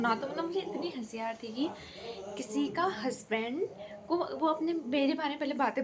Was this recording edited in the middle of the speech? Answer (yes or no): no